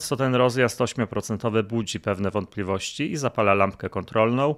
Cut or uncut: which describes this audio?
uncut